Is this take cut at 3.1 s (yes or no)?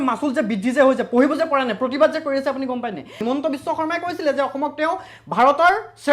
yes